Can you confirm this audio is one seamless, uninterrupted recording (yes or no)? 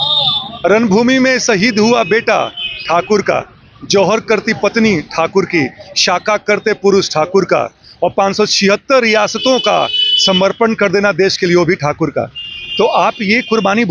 yes